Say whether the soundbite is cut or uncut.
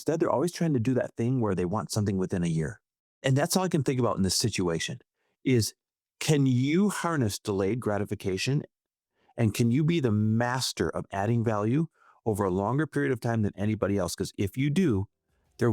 cut